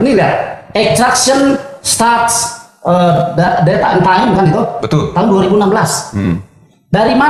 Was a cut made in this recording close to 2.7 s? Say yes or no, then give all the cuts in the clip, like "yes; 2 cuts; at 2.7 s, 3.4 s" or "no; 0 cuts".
no; 0 cuts